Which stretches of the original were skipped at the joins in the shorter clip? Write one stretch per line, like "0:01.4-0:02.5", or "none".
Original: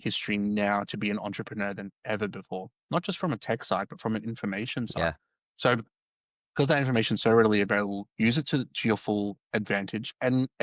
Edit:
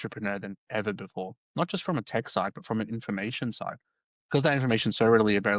0:05.0-0:05.9